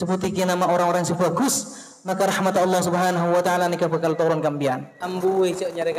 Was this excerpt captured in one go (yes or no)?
no